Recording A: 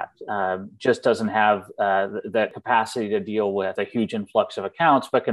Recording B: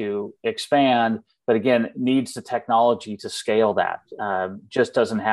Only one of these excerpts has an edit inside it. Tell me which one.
A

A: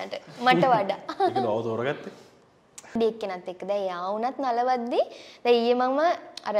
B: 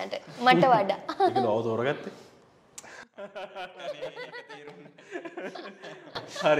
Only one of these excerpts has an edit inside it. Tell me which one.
A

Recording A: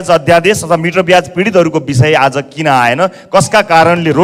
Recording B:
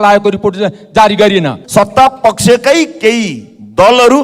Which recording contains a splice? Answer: B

